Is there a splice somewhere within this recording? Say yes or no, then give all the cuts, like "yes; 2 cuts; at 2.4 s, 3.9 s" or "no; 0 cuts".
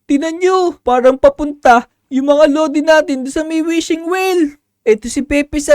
no; 0 cuts